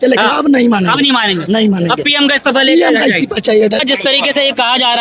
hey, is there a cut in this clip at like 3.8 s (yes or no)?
yes